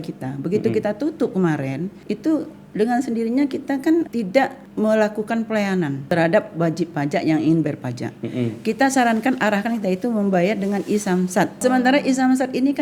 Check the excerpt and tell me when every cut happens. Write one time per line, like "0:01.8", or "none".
0:04.1
0:06.1
0:11.6